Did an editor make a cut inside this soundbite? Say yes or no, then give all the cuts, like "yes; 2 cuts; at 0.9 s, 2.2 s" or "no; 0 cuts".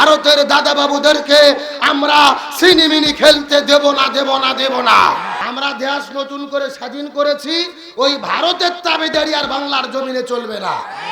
yes; 1 cut; at 5.4 s